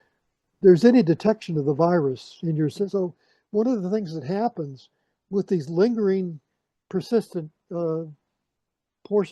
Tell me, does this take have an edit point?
yes; 1 cut; at 2.9 s

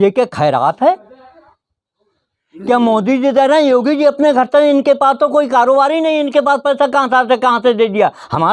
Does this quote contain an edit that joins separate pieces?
no; 0 cuts

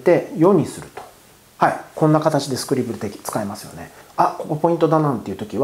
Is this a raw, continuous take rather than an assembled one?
no; 1 cut; at 4.0 s

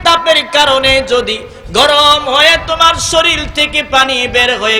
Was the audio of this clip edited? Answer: no; 0 cuts

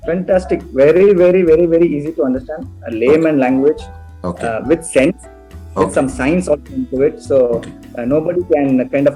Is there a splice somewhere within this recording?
no; 0 cuts

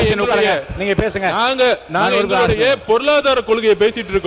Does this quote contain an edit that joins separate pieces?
no; 0 cuts

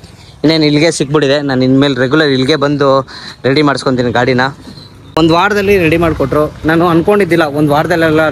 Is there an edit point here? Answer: yes; 1 cut; at 5.1 s

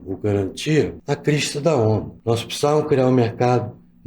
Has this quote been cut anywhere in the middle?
yes; 2 cuts; at 1.0 s, 2.1 s

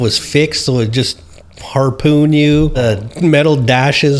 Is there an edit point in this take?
yes; 1 cut; at 2.8 s

